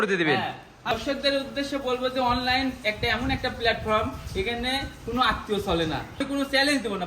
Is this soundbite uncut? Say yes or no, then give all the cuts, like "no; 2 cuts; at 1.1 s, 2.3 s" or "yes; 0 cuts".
no; 2 cuts; at 0.9 s, 6.2 s